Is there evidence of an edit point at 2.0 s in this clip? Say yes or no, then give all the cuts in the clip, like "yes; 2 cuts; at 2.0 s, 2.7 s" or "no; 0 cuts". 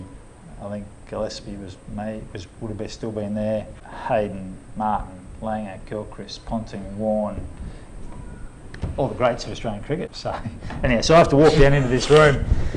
no; 2 cuts; at 3.8 s, 10.1 s